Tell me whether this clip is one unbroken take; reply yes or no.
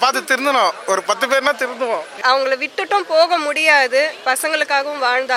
no